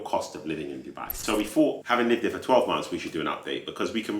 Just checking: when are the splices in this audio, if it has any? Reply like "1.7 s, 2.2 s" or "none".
1.1 s